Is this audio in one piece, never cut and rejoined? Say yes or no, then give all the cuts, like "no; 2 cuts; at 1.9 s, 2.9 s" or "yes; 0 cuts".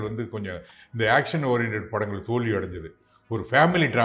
yes; 0 cuts